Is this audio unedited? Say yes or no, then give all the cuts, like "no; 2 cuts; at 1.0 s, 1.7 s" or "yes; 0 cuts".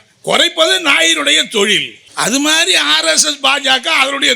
no; 1 cut; at 2.0 s